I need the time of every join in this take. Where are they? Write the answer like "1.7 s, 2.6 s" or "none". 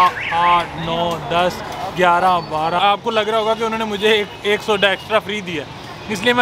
2.8 s